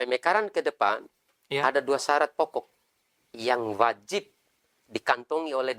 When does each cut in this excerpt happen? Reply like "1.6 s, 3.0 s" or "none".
none